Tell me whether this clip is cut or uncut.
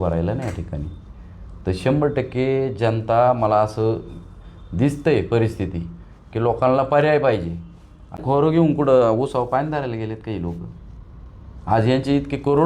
cut